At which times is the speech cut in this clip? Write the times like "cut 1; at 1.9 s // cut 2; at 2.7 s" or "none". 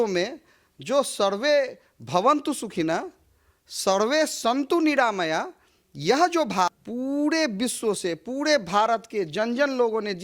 cut 1; at 6.7 s